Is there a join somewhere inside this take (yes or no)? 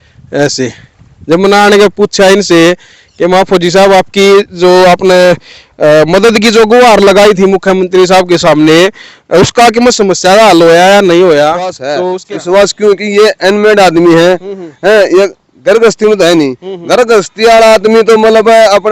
yes